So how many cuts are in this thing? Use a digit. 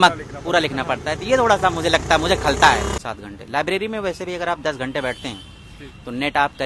1